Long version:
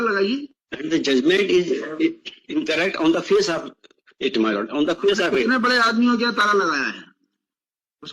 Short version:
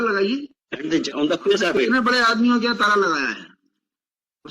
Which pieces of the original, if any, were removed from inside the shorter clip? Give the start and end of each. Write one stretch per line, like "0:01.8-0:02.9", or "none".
0:01.1-0:04.6